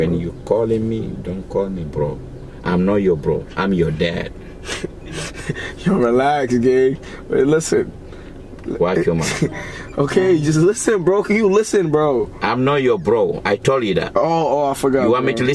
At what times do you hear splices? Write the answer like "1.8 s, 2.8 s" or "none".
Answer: none

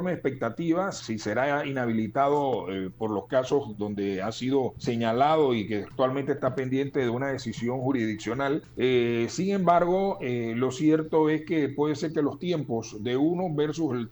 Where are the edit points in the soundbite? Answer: 1.0 s, 4.8 s, 8.7 s

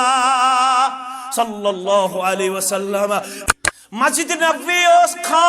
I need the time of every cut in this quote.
3.4 s

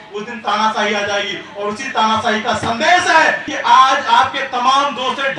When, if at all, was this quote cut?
3.5 s

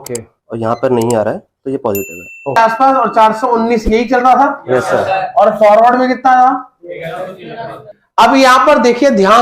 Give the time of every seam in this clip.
2.6 s, 7.9 s

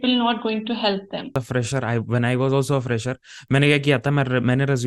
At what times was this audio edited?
1.4 s

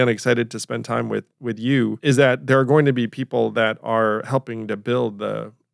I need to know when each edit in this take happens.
2.0 s

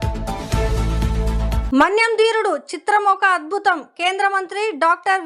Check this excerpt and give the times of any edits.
1.6 s

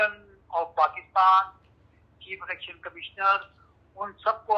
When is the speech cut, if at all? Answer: none

